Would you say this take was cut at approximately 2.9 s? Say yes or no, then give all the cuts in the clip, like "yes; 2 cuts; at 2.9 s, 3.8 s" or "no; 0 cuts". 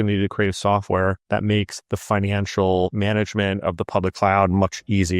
yes; 2 cuts; at 1.5 s, 2.9 s